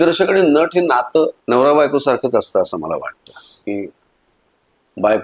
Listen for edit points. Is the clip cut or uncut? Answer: cut